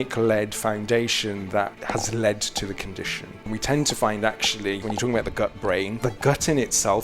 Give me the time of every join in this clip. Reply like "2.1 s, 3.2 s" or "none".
1.8 s, 3.5 s, 4.8 s, 6.0 s